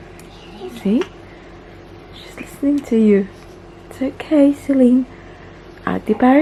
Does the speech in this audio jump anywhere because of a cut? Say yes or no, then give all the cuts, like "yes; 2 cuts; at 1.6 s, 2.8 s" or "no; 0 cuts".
no; 0 cuts